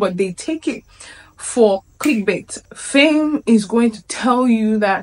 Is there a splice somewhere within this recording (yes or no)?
yes